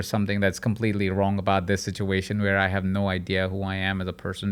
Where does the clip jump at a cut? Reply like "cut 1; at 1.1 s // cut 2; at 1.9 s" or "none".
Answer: none